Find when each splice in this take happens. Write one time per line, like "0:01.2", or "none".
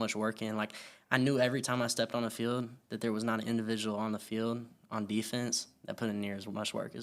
none